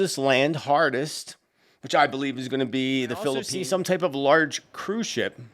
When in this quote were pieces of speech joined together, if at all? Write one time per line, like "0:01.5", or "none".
0:03.5